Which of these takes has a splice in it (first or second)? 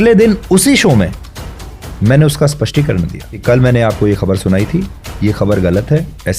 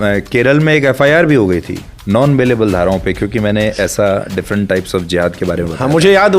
first